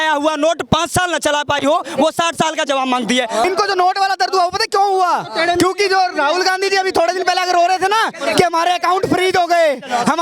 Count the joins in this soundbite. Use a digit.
1